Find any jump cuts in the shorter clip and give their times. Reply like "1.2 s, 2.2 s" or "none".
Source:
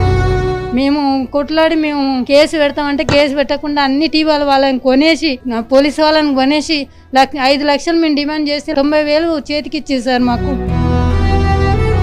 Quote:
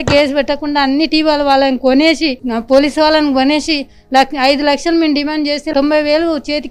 none